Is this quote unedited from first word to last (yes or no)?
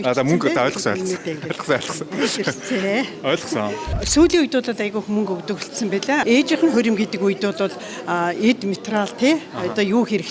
yes